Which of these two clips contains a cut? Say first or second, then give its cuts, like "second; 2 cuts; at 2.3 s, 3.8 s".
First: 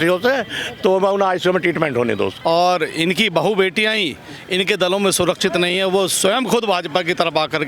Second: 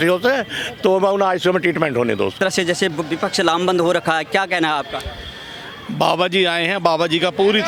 first; 1 cut; at 2.3 s